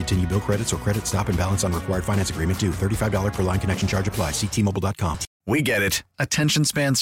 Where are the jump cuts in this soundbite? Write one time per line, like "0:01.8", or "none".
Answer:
0:05.3

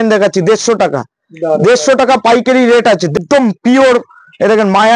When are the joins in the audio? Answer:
0:03.2

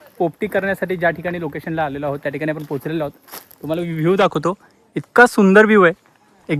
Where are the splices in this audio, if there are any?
none

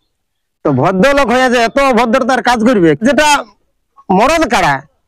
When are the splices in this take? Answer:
0:03.0

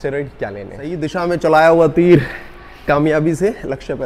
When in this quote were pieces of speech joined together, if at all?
0:00.9

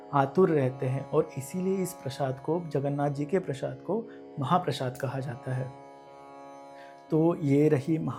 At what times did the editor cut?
none

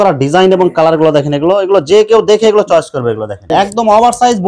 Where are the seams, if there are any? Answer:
0:03.5

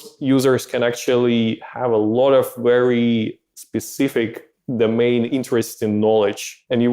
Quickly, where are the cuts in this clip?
0:05.3

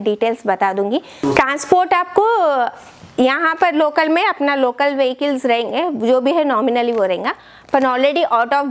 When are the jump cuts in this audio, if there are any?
0:01.1

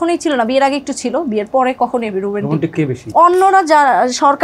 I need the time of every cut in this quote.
0:03.0

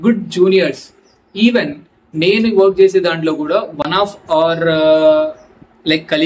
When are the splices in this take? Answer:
none

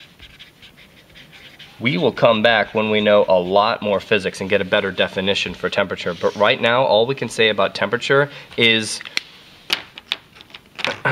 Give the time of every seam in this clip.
0:03.0

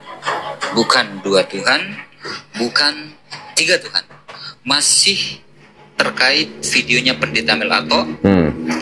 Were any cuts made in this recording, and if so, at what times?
none

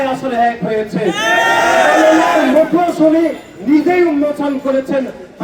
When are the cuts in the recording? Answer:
none

